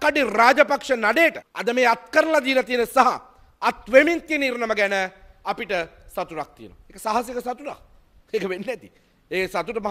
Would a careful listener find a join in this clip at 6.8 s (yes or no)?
no